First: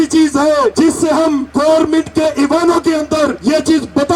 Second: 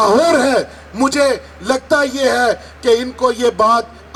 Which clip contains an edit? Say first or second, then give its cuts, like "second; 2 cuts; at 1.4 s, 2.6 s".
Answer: first; 2 cuts; at 1.1 s, 3.4 s